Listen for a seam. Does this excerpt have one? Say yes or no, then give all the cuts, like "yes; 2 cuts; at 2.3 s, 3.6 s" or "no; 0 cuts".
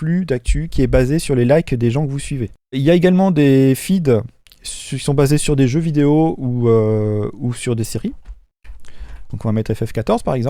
yes; 1 cut; at 2.8 s